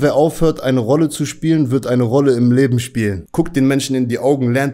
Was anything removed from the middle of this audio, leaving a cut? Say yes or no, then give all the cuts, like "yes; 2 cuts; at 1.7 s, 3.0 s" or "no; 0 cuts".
yes; 1 cut; at 3.2 s